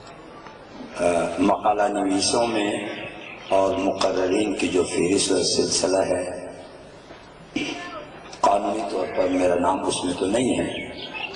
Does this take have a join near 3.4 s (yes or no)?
no